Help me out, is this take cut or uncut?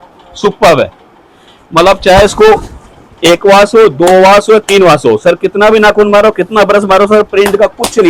uncut